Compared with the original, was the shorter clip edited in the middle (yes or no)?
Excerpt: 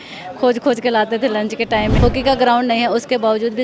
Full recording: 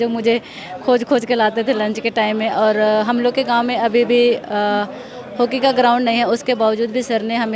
yes